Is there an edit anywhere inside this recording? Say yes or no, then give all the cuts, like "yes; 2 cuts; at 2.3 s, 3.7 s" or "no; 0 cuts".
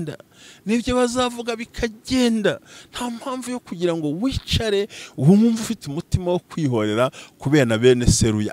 no; 0 cuts